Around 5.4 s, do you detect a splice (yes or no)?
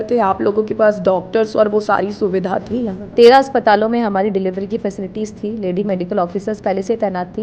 no